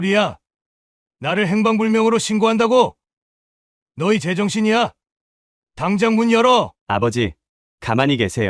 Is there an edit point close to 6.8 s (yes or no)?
yes